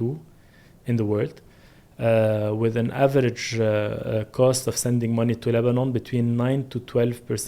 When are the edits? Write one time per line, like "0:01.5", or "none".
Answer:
none